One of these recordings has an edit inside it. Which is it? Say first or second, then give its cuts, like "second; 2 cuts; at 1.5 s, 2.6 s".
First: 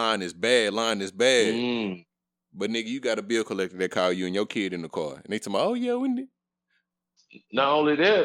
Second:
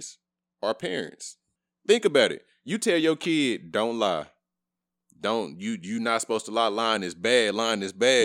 second; 1 cut; at 1.1 s